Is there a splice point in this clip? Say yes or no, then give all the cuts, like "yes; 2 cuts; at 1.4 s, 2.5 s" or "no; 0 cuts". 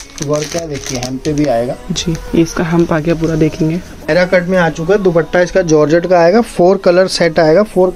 yes; 1 cut; at 4.1 s